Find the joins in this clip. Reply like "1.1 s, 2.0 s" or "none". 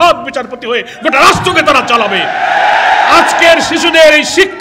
none